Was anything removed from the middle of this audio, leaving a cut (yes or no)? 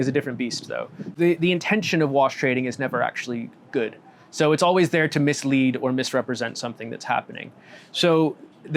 yes